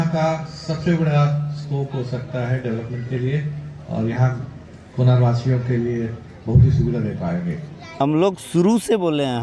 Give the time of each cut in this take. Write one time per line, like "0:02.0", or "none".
0:08.0